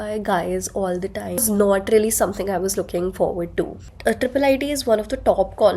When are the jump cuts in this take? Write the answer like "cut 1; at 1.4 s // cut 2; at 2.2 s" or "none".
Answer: cut 1; at 1.4 s